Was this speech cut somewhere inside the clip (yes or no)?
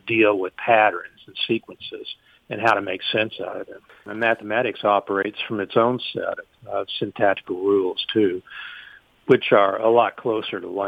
yes